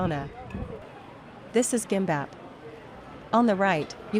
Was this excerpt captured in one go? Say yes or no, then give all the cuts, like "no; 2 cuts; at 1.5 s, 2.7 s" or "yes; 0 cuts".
no; 1 cut; at 0.9 s